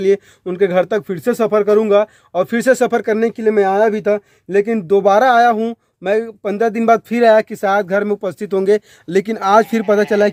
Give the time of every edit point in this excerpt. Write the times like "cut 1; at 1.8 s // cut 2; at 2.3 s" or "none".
none

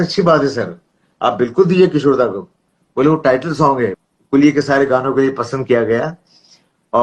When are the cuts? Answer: cut 1; at 4.1 s

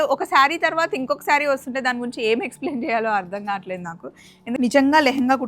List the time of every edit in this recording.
cut 1; at 4.6 s

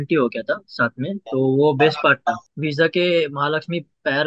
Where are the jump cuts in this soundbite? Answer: cut 1; at 2.4 s

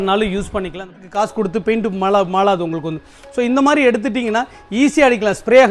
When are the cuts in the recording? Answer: cut 1; at 0.9 s

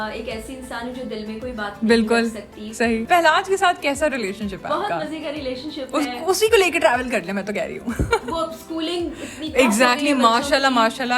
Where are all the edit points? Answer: cut 1; at 3.0 s

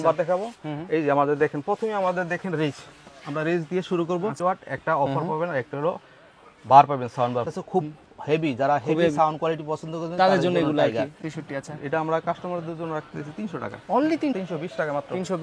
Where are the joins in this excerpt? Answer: cut 1; at 4.4 s // cut 2; at 7.5 s // cut 3; at 11.2 s // cut 4; at 14.4 s

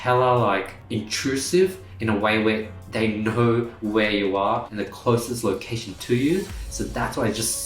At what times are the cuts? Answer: cut 1; at 4.7 s

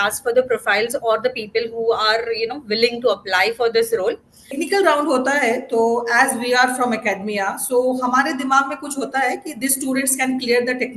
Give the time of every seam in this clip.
cut 1; at 4.5 s

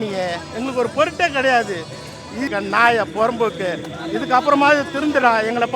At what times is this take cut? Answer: cut 1; at 2.5 s

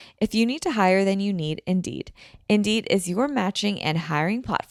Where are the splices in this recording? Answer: none

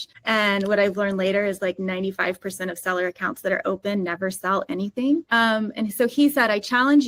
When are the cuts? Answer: none

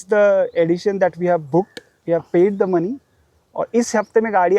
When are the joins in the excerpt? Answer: none

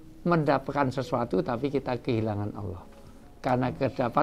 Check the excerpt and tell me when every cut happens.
none

